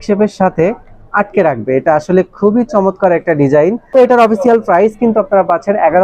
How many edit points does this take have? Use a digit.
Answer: 1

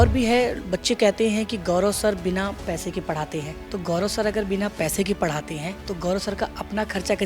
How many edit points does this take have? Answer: 2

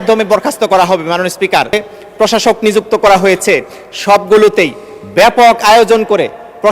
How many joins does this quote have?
1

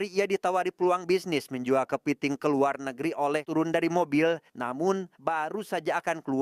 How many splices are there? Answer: 1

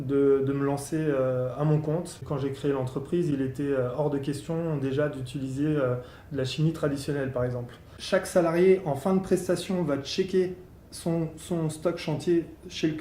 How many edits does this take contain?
2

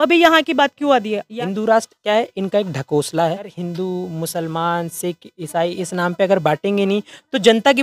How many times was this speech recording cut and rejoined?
2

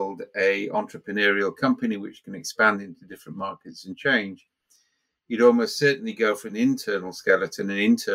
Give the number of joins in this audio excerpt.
0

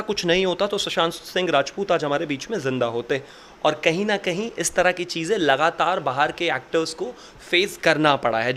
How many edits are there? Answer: 0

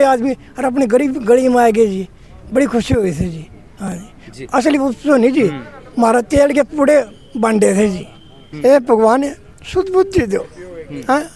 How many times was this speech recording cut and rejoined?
1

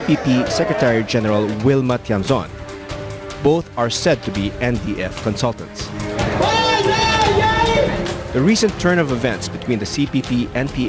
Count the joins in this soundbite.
0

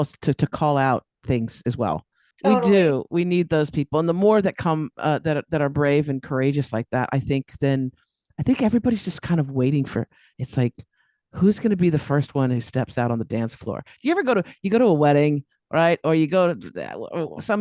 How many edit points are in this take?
1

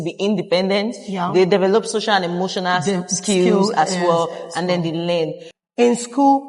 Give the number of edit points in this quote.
1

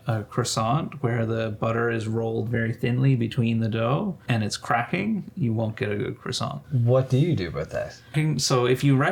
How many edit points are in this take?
3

